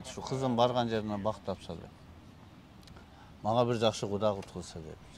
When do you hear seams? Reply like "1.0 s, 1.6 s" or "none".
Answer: none